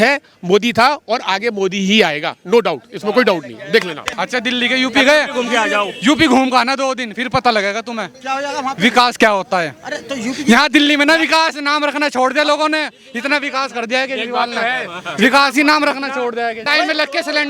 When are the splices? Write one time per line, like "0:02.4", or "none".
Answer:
0:04.0
0:16.6